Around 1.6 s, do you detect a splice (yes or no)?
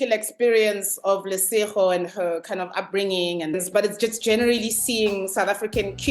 no